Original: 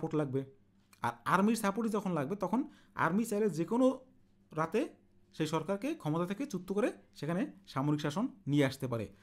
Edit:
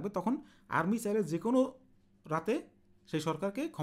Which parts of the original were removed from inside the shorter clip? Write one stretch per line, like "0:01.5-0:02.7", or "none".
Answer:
none